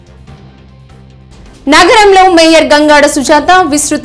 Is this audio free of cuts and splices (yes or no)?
yes